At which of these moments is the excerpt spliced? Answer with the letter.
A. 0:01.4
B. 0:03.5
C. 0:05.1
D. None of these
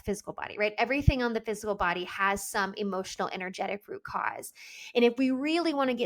D